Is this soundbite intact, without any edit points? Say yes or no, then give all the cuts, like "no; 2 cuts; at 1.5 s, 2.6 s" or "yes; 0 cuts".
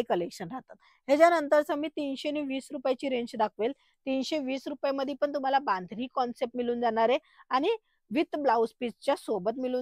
yes; 0 cuts